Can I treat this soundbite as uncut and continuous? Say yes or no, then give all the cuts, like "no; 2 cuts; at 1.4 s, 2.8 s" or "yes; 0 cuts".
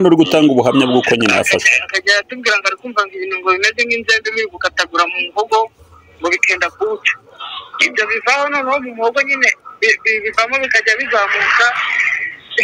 yes; 0 cuts